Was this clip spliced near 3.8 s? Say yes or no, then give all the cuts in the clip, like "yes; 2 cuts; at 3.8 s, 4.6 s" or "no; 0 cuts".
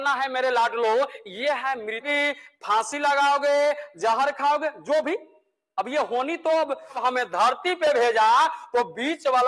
no; 2 cuts; at 2.1 s, 7.0 s